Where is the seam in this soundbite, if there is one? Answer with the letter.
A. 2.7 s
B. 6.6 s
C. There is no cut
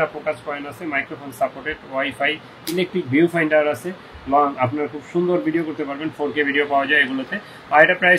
C